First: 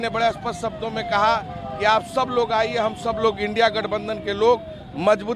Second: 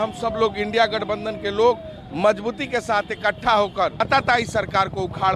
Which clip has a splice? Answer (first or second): second